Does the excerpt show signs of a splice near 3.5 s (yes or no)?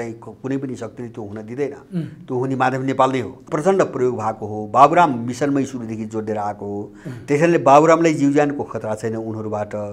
yes